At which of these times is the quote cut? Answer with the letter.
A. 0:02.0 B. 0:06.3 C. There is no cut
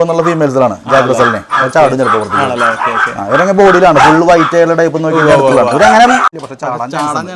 B